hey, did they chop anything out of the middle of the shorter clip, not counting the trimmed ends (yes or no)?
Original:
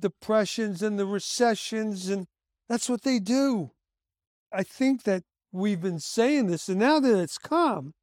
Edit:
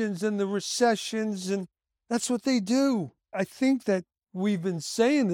yes